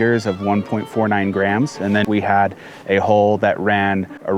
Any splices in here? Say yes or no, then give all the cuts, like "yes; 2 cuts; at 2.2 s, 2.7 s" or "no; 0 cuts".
yes; 1 cut; at 2.0 s